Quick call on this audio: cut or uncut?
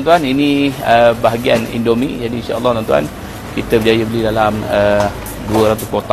uncut